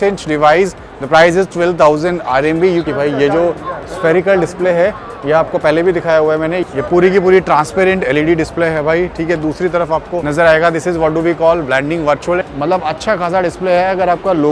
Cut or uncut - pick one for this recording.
cut